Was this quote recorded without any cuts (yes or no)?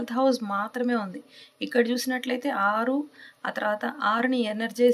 yes